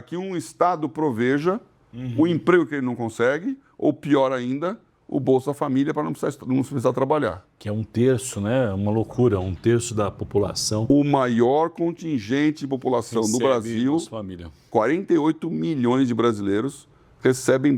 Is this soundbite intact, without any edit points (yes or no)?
no